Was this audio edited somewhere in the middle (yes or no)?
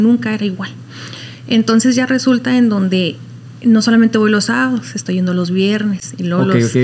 no